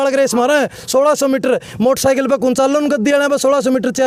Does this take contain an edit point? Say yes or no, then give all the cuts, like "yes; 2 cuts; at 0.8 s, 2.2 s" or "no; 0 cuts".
no; 0 cuts